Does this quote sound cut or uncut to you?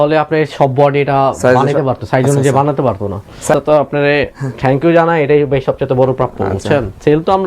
cut